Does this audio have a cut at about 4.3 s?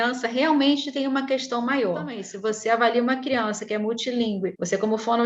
no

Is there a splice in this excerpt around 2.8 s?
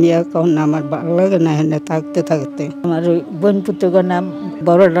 yes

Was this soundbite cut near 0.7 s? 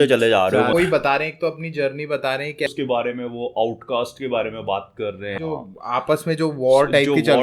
yes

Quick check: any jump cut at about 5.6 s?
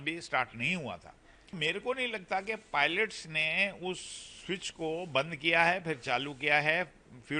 no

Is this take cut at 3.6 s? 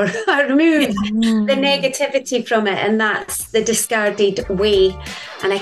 no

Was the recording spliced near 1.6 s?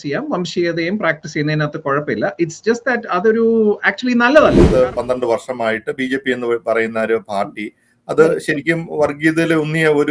no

